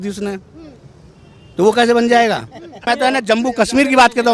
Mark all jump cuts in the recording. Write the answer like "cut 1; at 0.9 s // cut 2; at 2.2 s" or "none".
cut 1; at 2.8 s